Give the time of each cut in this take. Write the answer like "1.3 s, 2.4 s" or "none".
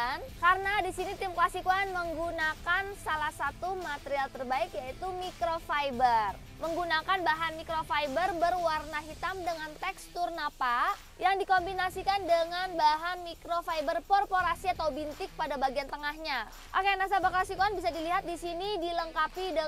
6.5 s, 16.6 s